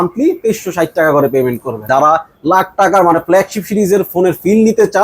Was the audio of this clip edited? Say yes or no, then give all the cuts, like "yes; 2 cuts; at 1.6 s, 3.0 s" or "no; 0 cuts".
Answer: yes; 1 cut; at 1.9 s